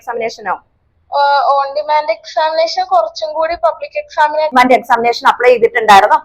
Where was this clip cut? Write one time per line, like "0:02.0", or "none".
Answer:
0:04.5